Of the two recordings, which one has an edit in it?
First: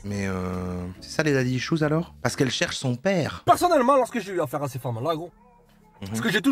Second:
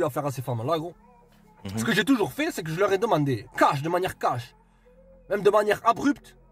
first; 2 cuts; at 2.1 s, 3.4 s

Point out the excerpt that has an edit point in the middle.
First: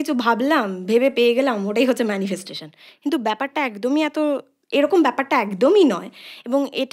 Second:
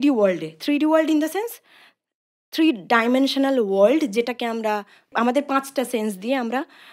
second; 1 cut; at 5.1 s

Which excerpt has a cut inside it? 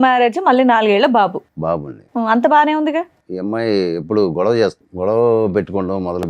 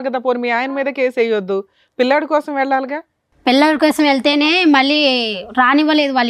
first; 2 cuts; at 3.2 s, 4.8 s

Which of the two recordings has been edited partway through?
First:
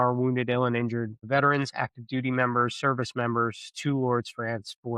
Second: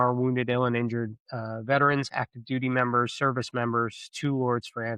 first; 1 cut; at 1.2 s

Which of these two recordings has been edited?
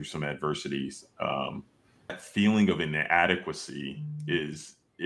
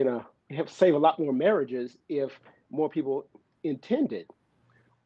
first; 1 cut; at 2.2 s

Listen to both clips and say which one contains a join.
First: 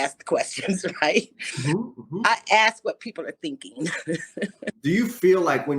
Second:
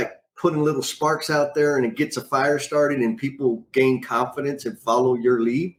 first; 1 cut; at 4.7 s

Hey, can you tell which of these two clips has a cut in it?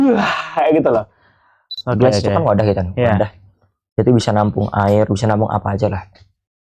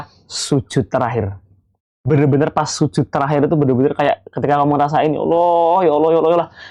first; 1 cut; at 1.8 s

